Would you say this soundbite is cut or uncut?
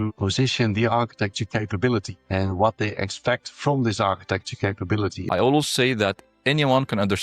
cut